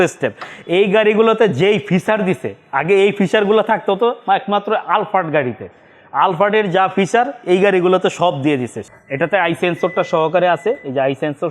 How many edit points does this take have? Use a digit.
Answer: 1